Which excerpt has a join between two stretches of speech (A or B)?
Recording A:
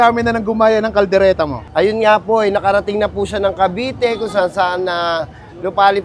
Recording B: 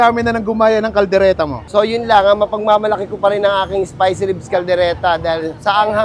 B